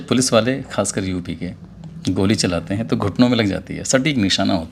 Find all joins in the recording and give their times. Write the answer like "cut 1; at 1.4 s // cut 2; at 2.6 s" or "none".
none